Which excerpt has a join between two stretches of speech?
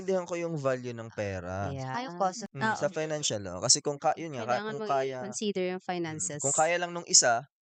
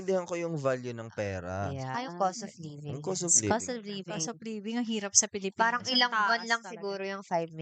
first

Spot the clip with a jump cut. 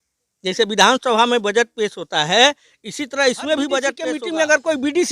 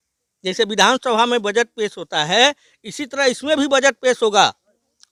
first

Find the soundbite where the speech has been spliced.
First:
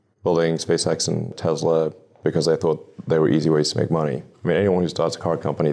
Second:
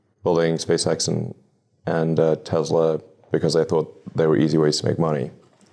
first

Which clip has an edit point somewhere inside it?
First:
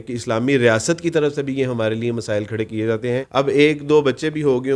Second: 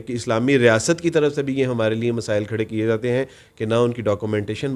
first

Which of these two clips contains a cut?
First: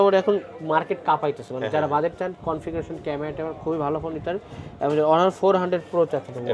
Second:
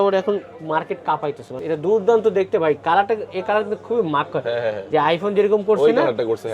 second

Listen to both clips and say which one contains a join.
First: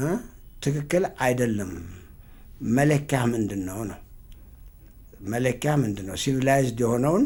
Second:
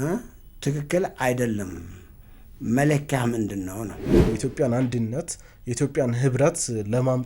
second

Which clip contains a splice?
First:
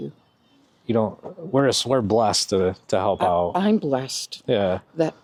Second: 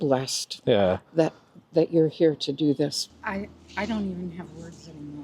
second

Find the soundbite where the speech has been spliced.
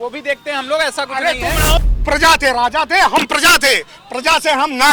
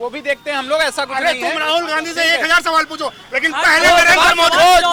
first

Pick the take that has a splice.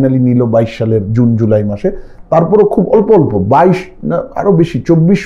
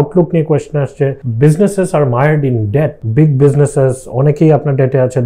second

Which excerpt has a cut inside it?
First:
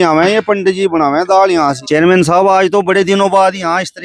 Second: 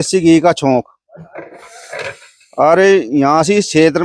first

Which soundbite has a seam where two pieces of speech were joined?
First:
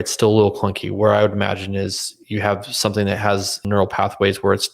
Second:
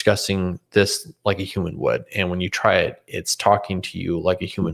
first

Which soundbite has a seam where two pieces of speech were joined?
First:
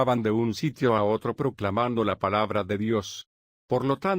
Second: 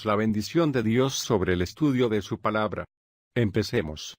first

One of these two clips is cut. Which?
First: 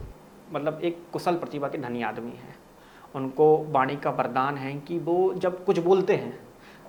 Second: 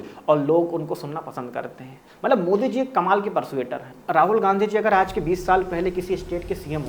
second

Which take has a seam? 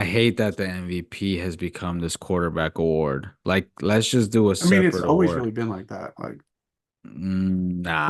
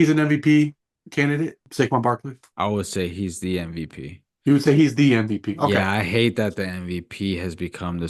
second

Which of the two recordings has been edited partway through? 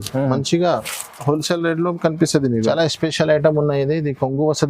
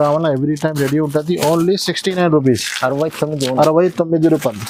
first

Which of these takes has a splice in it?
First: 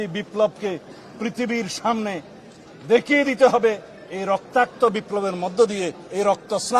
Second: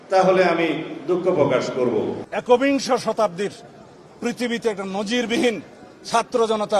second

